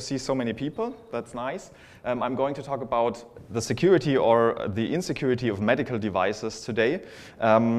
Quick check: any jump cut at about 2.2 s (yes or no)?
no